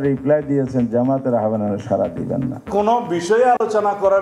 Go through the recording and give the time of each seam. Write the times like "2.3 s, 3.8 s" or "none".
2.7 s